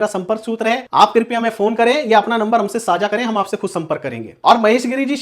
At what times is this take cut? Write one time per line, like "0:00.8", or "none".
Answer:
0:04.3